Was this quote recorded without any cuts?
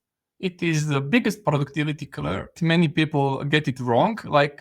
no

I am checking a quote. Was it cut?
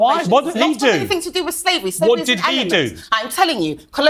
no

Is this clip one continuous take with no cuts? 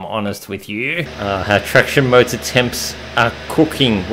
no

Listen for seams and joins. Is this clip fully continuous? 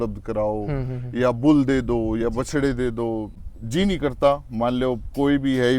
no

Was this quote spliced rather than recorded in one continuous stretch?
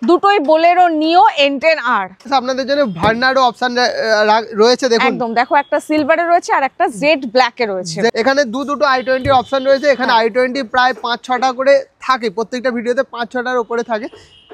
yes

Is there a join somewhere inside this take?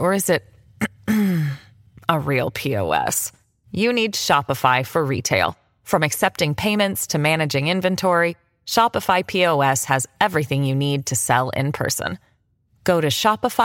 no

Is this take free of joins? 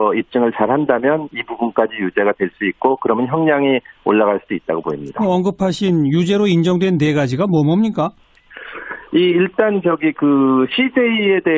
no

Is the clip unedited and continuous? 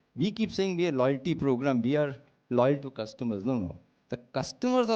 yes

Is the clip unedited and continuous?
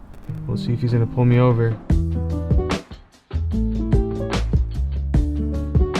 no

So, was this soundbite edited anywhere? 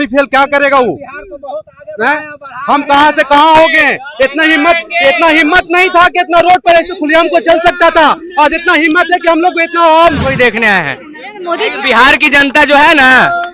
yes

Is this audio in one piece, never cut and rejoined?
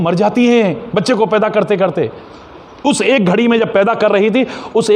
yes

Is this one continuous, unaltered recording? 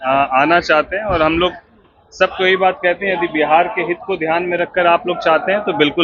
yes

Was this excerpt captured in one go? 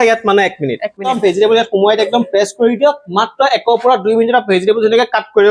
no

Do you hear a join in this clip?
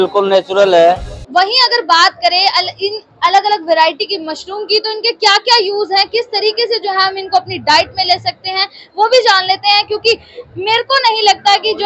yes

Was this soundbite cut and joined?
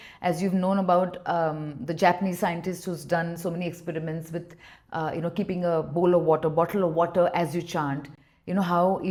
no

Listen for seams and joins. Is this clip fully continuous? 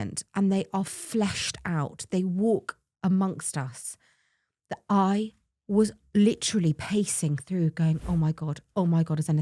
yes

